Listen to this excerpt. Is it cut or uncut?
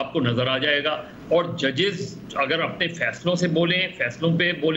uncut